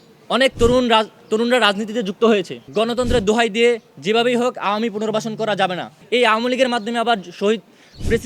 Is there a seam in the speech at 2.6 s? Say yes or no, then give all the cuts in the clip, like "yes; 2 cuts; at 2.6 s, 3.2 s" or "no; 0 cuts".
yes; 2 cuts; at 2.6 s, 6.0 s